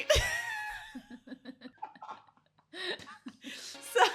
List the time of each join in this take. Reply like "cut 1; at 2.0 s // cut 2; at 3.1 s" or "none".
cut 1; at 1.8 s

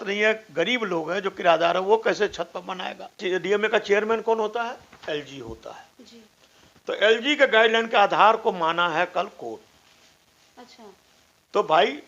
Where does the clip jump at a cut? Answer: cut 1; at 3.2 s

